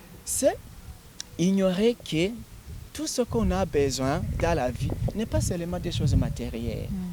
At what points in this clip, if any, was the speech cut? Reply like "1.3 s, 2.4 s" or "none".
none